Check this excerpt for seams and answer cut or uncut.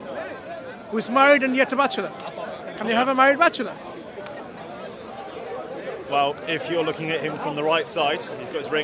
uncut